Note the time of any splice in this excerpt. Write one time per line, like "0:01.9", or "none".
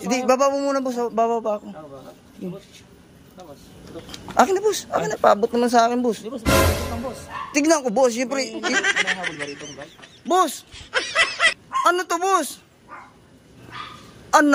0:10.1